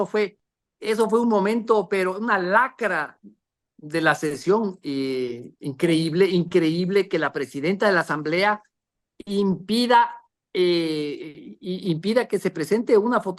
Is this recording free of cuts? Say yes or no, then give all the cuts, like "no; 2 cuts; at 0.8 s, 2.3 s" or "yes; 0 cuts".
yes; 0 cuts